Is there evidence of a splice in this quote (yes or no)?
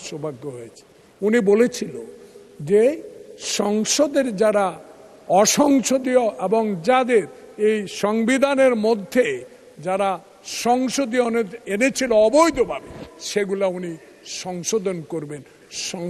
no